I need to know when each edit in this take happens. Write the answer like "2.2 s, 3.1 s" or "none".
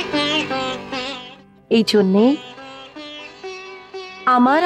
1.2 s

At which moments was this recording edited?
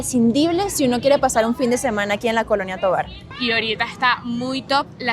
3.3 s

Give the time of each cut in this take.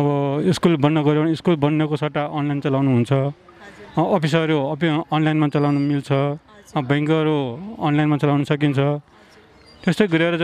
none

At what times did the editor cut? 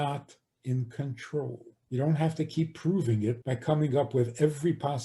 1.7 s, 3.5 s

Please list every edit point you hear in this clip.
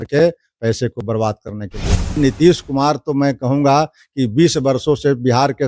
2.2 s

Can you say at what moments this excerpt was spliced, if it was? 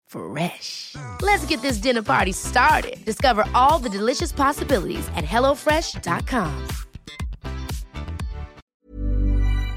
8.6 s

